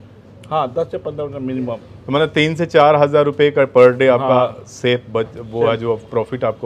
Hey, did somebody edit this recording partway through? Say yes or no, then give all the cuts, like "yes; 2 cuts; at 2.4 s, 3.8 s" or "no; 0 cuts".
no; 0 cuts